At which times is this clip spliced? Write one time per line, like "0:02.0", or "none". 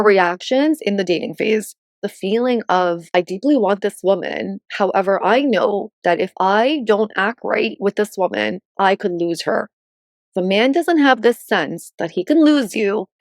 0:02.1